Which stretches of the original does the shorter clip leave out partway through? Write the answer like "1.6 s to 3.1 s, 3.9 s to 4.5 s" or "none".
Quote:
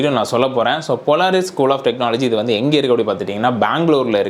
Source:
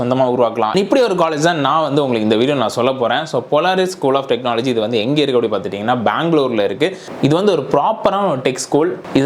none